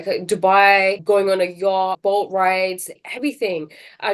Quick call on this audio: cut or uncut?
cut